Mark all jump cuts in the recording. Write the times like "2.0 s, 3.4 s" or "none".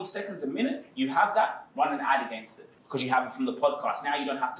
none

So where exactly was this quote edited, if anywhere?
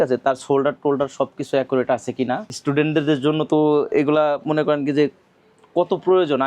2.5 s

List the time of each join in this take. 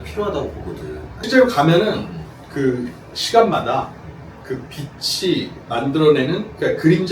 1.2 s

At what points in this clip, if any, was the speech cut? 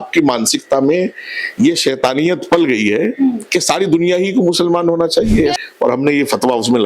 5.6 s

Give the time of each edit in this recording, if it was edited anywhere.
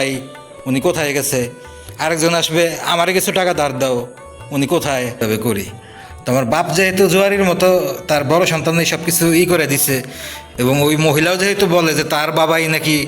5.2 s

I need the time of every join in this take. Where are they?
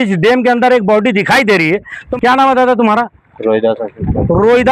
2.0 s

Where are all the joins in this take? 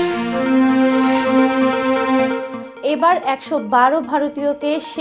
2.6 s

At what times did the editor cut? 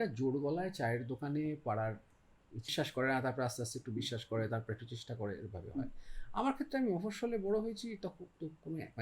2.7 s

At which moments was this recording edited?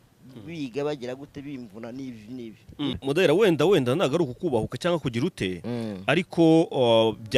3.0 s

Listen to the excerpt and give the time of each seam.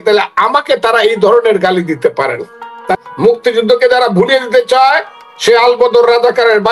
3.0 s

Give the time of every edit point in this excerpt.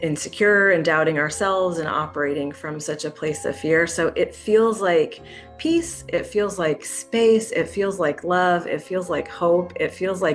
none

